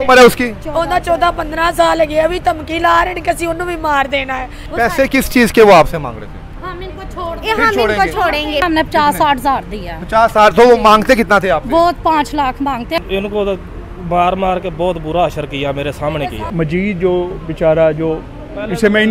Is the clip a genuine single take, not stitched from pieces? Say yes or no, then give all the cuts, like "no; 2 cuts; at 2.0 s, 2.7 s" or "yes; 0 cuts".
no; 4 cuts; at 4.6 s, 8.6 s, 13.0 s, 16.4 s